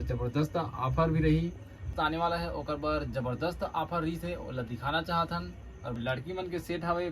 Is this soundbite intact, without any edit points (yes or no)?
no